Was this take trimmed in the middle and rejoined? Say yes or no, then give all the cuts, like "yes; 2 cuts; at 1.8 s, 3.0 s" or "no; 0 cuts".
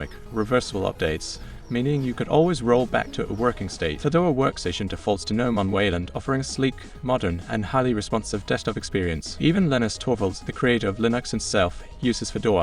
yes; 2 cuts; at 4.0 s, 9.3 s